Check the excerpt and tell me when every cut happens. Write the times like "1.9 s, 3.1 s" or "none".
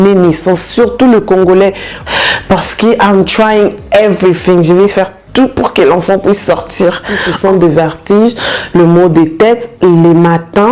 1.9 s, 7.2 s